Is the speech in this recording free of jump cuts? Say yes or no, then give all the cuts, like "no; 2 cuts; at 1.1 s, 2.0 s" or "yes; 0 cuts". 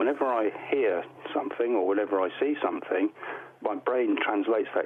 yes; 0 cuts